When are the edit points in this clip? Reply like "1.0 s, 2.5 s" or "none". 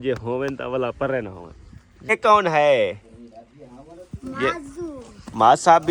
2.1 s

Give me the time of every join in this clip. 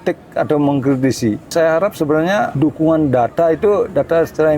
1.4 s, 2.5 s

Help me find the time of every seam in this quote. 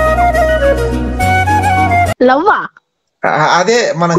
2.1 s

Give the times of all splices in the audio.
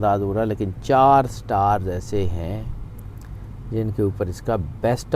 none

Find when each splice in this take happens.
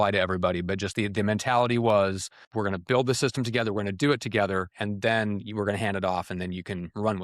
2.4 s

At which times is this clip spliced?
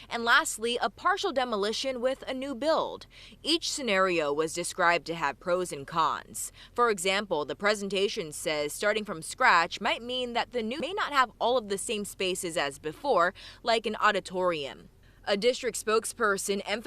10.8 s

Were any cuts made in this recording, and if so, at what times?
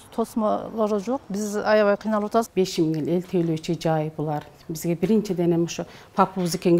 2.5 s

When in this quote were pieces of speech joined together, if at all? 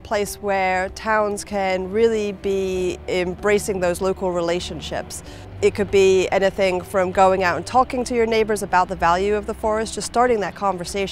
5.4 s

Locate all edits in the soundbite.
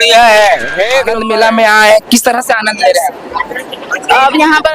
1.1 s

